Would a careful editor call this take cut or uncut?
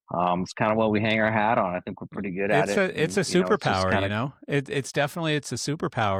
uncut